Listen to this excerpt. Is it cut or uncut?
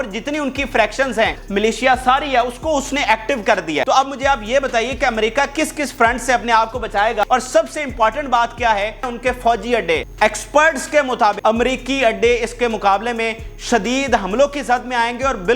cut